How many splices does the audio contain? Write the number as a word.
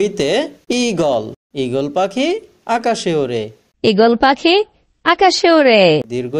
one